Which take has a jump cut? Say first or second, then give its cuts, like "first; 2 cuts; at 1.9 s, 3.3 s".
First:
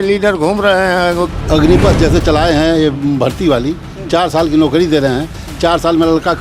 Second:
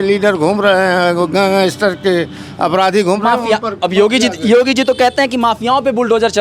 first; 1 cut; at 1.3 s